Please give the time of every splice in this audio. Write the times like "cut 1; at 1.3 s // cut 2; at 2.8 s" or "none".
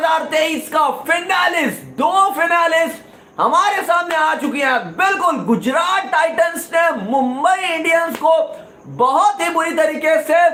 none